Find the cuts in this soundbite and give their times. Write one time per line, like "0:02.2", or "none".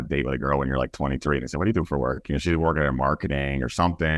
none